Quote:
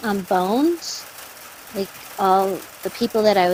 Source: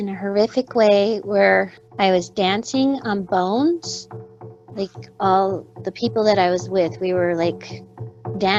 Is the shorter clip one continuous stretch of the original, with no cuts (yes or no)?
yes